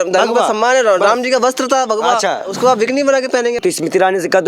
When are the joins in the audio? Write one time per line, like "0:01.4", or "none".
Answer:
0:02.5
0:03.6